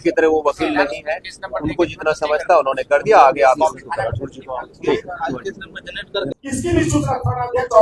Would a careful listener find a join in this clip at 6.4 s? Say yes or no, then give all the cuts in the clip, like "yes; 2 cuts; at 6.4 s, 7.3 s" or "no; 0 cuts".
yes; 1 cut; at 6.4 s